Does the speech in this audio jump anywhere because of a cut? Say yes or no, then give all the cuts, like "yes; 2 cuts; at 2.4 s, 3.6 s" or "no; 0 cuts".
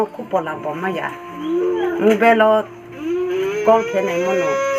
no; 0 cuts